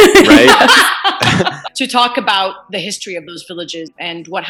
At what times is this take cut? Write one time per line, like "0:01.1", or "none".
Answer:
0:01.6